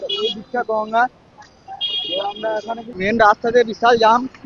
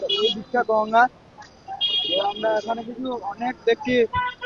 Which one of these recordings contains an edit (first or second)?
first